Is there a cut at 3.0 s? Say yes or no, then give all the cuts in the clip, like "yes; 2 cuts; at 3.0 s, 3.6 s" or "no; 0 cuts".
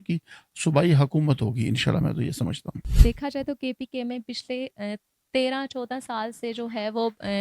yes; 1 cut; at 3.0 s